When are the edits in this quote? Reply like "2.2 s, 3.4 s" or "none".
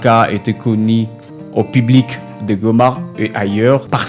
none